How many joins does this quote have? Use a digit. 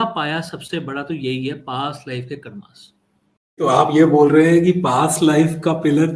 1